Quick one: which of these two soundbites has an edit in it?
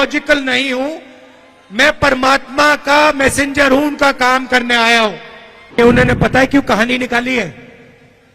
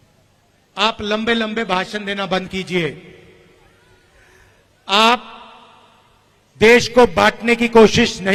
first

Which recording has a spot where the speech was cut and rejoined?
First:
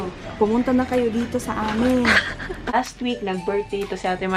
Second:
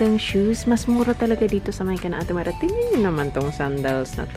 first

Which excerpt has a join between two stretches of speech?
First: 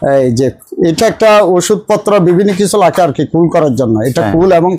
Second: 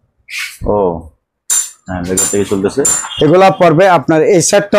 second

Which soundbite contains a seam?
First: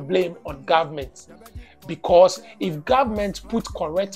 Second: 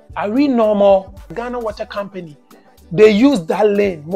second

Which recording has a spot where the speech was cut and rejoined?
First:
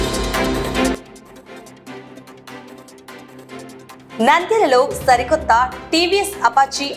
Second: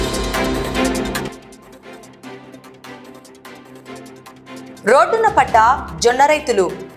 first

